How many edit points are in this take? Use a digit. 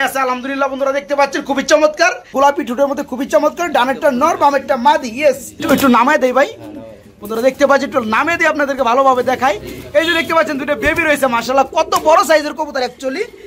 2